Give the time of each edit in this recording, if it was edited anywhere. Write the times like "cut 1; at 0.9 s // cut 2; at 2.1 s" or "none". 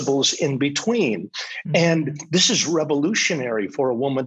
none

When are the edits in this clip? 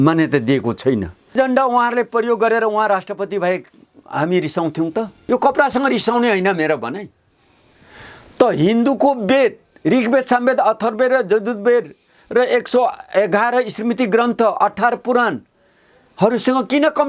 cut 1; at 1.3 s // cut 2; at 5.2 s

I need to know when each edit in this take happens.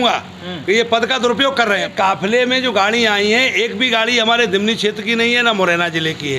cut 1; at 1.9 s

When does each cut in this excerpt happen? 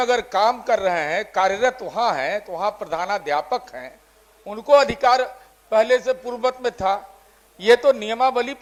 none

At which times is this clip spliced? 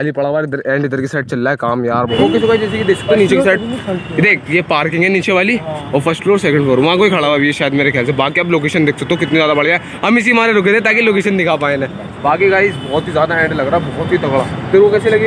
cut 1; at 2.1 s

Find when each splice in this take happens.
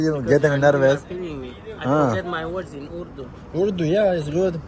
none

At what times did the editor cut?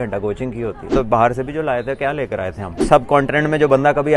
cut 1; at 0.9 s // cut 2; at 2.8 s

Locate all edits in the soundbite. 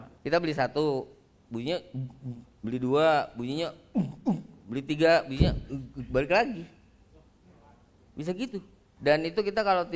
cut 1; at 8.8 s

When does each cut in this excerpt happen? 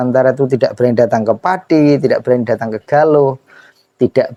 none

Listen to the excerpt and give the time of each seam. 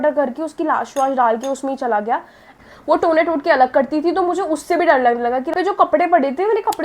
cut 1; at 2.6 s // cut 2; at 5.5 s

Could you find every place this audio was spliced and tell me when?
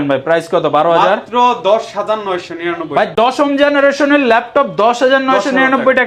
none

